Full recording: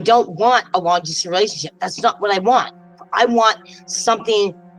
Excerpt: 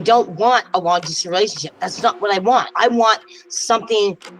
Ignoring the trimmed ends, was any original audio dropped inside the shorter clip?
yes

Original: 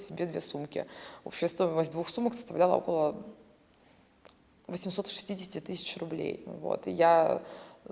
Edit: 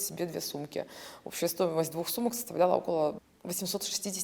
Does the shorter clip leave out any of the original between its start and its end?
yes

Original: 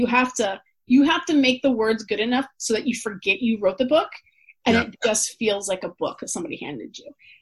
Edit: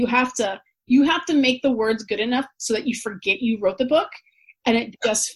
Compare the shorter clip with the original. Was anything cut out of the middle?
no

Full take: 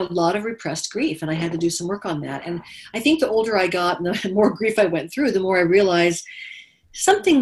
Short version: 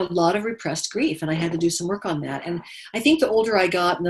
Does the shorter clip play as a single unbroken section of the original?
yes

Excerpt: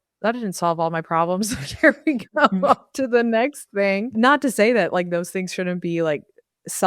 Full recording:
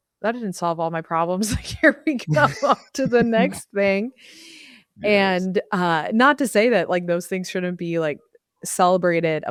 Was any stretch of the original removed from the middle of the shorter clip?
yes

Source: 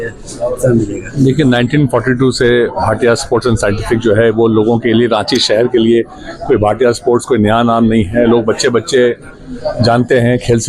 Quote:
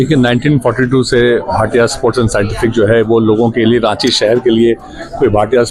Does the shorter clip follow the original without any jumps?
yes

